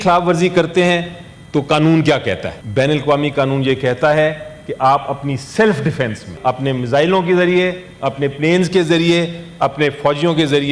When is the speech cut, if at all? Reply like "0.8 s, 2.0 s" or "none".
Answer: 2.6 s, 6.3 s

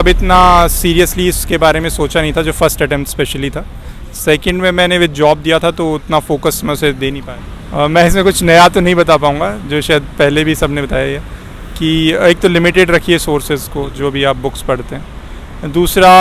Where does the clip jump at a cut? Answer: 7.2 s

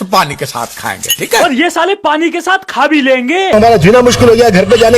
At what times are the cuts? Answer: 3.5 s

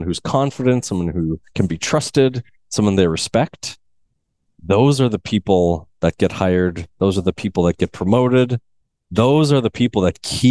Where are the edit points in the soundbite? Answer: none

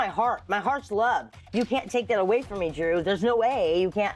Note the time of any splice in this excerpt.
none

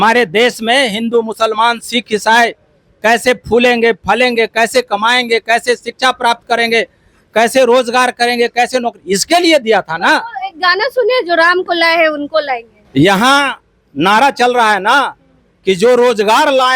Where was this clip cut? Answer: 12.7 s

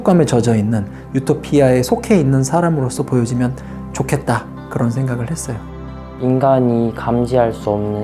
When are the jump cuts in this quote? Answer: 5.6 s

